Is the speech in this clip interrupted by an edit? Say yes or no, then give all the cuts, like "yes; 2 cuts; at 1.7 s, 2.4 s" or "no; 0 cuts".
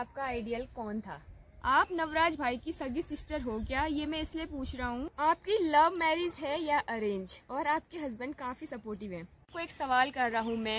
yes; 3 cuts; at 1.6 s, 5.1 s, 9.4 s